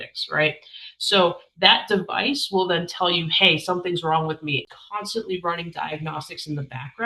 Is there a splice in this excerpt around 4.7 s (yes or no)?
yes